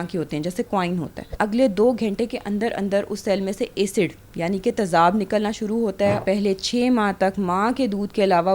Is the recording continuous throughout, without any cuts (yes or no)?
no